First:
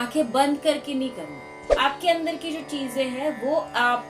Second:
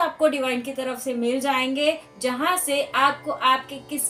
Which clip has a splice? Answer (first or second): first